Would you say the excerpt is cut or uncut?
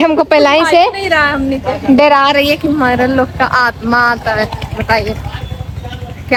uncut